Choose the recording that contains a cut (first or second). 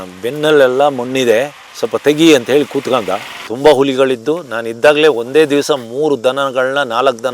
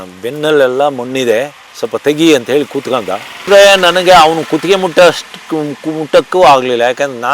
first